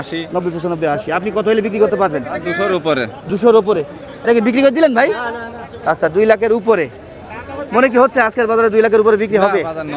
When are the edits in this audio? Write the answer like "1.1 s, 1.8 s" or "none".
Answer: none